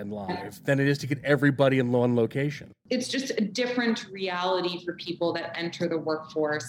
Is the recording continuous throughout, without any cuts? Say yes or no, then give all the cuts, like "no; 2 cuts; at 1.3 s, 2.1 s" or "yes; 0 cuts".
no; 1 cut; at 2.8 s